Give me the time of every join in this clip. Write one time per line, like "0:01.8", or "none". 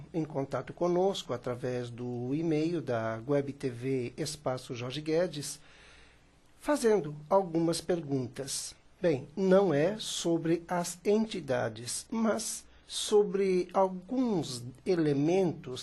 0:07.5